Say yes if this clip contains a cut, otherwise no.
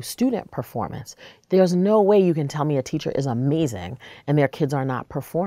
no